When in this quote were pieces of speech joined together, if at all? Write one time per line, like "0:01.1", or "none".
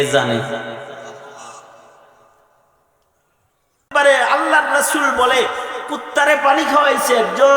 0:03.8